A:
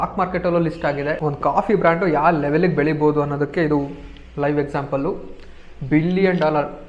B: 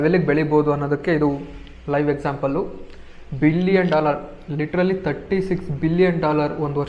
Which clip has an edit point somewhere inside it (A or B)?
A